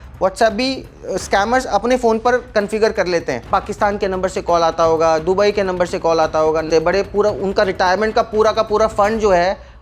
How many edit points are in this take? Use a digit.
2